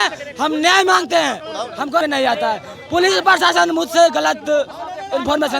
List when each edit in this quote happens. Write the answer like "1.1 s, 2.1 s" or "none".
2.0 s